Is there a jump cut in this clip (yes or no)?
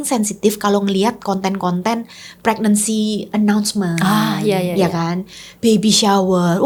no